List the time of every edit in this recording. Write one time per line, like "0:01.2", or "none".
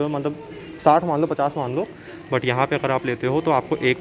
none